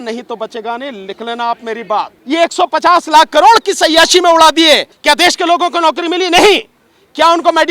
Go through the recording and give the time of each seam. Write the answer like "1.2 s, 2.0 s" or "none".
2.2 s, 4.9 s